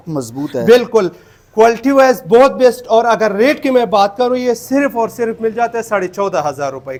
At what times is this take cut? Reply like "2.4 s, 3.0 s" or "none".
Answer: none